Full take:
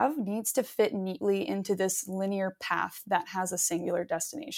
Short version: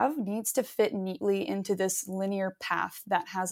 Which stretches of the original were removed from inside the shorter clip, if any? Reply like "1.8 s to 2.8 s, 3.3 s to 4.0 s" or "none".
none